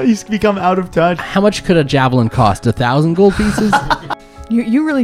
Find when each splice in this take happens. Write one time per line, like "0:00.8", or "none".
0:01.2
0:03.9